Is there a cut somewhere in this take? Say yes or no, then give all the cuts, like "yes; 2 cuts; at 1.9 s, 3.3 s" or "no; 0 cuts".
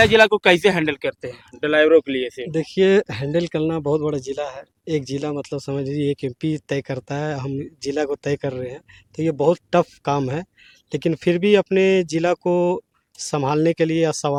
no; 0 cuts